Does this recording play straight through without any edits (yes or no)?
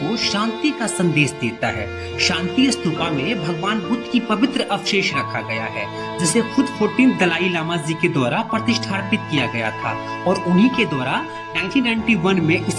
yes